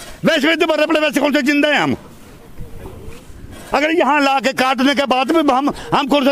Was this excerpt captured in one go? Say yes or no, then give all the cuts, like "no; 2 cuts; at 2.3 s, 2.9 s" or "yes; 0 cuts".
yes; 0 cuts